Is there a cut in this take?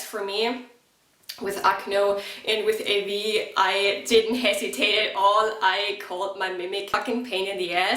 yes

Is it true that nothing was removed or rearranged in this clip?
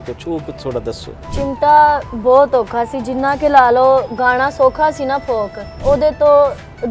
no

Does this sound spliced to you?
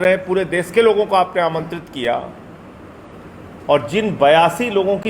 no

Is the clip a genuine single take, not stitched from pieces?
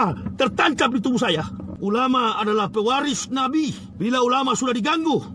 no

